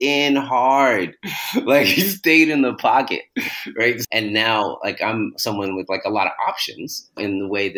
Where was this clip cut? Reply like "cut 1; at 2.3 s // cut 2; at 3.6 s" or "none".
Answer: cut 1; at 4.0 s